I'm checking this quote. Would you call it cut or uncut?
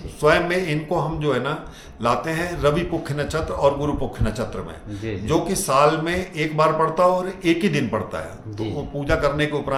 uncut